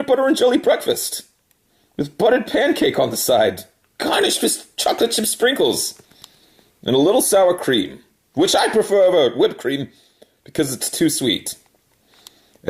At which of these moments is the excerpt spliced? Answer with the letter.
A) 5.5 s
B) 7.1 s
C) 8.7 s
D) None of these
B